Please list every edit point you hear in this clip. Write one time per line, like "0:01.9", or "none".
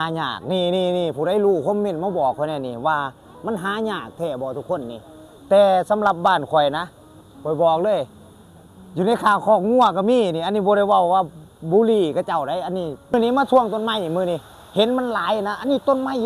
0:13.1